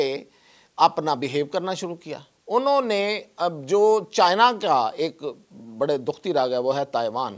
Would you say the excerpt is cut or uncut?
uncut